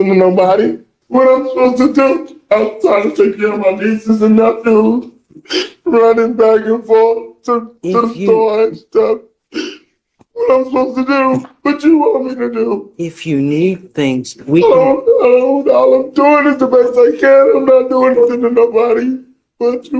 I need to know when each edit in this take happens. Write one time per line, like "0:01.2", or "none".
0:00.9